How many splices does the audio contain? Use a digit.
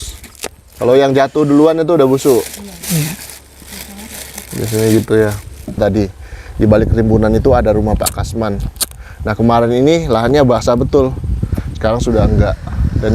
1